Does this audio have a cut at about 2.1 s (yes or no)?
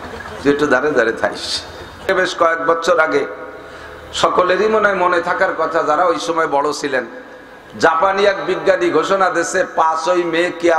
yes